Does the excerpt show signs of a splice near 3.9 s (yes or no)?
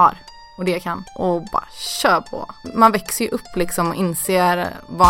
no